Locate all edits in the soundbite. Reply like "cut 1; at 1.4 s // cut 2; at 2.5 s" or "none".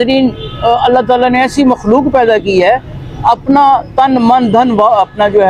none